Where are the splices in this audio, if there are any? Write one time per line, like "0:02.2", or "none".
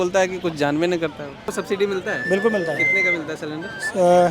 0:01.5